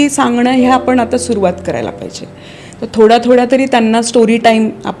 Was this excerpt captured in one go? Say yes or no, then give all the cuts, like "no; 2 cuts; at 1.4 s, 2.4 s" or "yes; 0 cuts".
yes; 0 cuts